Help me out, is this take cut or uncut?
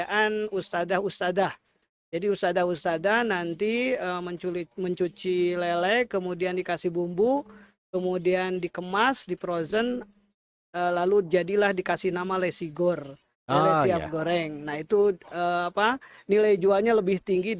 uncut